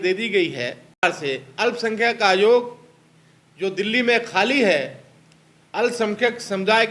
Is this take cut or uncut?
cut